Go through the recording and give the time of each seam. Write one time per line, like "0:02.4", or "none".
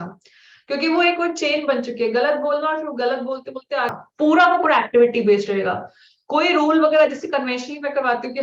0:04.0